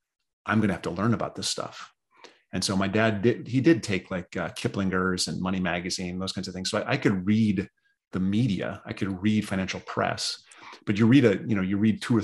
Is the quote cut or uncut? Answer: uncut